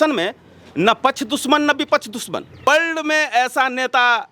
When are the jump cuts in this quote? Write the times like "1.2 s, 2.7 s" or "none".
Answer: 2.6 s

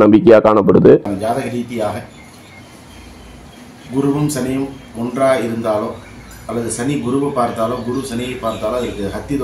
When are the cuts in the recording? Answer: 1.1 s

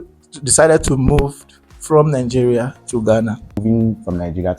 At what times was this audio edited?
3.6 s

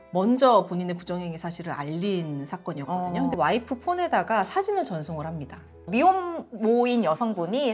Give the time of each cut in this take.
3.3 s, 5.7 s

